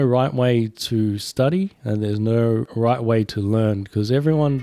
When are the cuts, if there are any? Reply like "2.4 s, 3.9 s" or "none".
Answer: 2.7 s

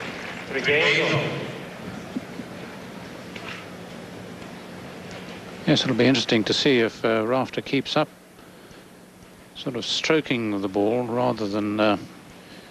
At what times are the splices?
4.8 s

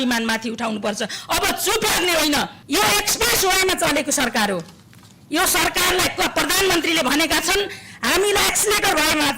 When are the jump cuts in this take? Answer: 2.6 s

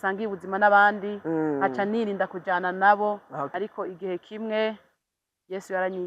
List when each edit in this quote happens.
3.5 s

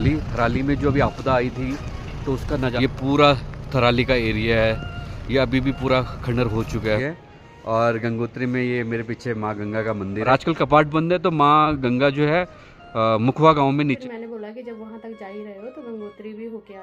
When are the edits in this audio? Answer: 2.5 s, 7.0 s, 10.2 s, 14.0 s

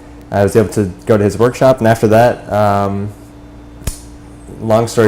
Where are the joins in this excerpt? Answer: 1.1 s

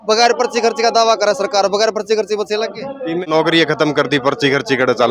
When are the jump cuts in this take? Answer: 3.2 s

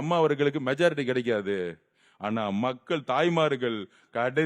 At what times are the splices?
none

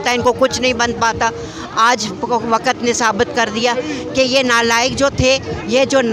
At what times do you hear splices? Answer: none

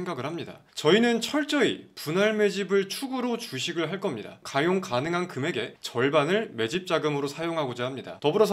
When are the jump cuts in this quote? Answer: none

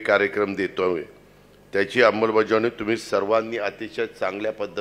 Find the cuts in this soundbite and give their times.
none

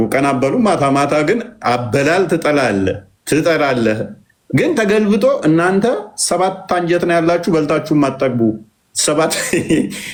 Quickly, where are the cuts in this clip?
none

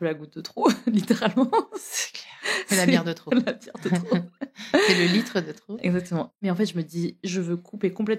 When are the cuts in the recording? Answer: 6.4 s

